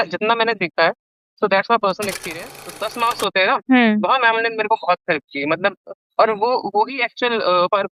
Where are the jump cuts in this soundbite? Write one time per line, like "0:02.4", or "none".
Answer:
0:02.7